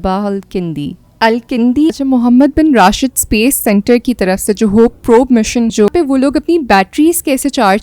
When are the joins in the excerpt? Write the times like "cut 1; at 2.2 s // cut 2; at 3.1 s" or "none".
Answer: cut 1; at 1.9 s // cut 2; at 5.9 s